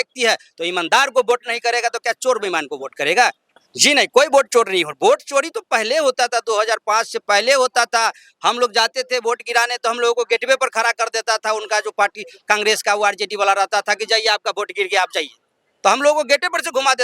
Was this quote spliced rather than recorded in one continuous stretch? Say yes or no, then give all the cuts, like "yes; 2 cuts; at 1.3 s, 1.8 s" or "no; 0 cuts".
yes; 1 cut; at 3.7 s